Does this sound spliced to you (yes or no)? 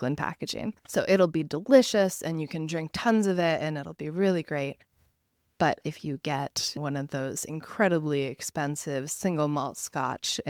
no